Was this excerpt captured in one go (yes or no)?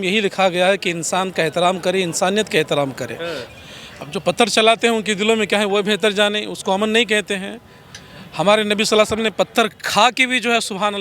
no